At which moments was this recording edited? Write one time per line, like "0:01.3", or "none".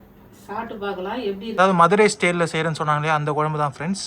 0:01.6